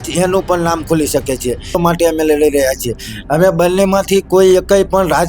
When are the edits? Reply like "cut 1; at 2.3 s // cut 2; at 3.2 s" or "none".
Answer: cut 1; at 1.8 s